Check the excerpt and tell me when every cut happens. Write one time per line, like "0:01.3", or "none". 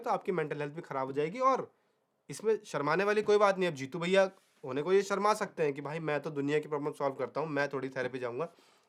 none